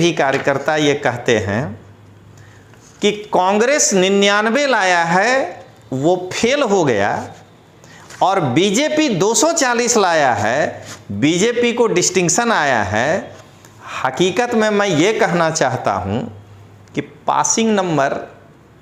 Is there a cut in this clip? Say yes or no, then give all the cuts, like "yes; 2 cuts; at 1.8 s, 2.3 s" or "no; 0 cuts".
no; 0 cuts